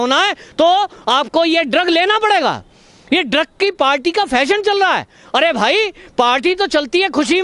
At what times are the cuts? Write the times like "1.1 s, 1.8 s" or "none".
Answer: none

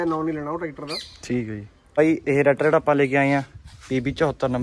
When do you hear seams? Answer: 1.8 s

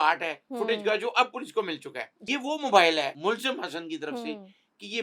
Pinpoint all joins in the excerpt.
2.2 s, 3.2 s

